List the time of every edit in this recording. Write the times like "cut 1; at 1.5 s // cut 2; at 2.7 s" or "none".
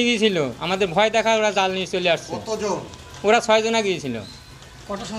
none